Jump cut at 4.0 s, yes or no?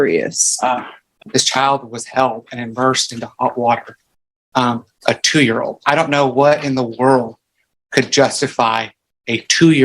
no